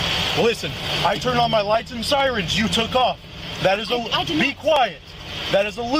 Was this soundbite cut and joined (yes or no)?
no